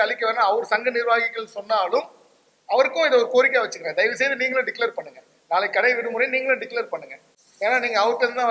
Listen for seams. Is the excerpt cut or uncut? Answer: uncut